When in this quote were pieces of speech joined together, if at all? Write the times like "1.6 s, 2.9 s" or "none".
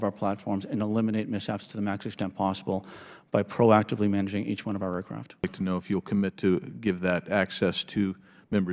5.2 s

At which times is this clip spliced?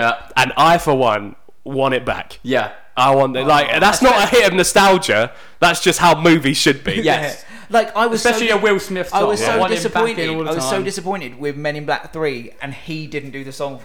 none

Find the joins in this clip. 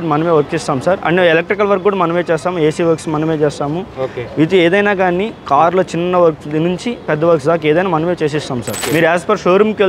8.8 s

